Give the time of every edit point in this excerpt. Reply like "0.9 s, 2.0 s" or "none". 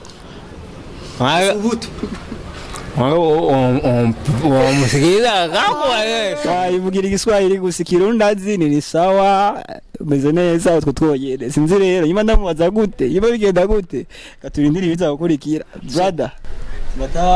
6.4 s, 15.8 s